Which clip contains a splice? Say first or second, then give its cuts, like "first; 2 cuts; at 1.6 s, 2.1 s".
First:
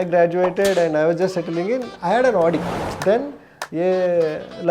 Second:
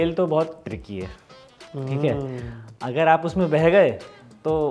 first; 1 cut; at 2.8 s